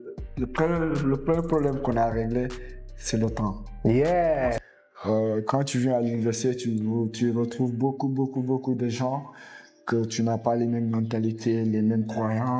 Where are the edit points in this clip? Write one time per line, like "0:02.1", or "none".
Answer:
0:04.6

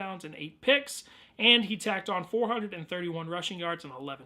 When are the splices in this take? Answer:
0:02.4

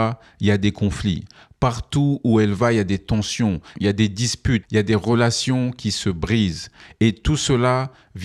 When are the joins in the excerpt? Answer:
none

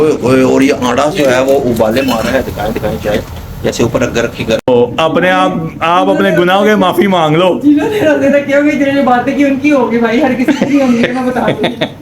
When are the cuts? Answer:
0:04.7

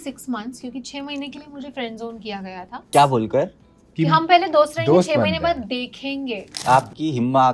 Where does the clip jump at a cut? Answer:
0:02.8

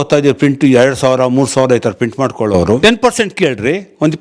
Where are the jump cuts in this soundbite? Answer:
0:02.8

